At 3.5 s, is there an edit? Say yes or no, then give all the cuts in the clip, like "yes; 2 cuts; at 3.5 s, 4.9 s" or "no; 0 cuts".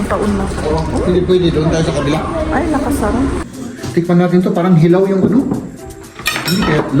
yes; 1 cut; at 3.5 s